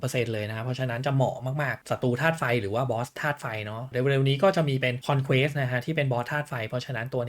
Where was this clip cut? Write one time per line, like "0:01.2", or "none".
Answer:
0:01.8